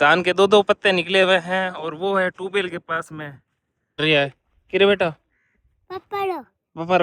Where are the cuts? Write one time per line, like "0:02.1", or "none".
0:04.0